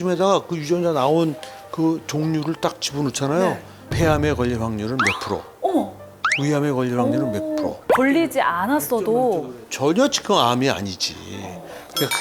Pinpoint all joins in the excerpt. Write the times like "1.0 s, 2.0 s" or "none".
none